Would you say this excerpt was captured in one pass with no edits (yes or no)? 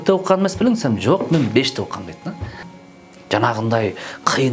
no